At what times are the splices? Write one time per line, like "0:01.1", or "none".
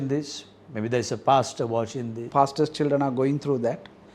0:02.2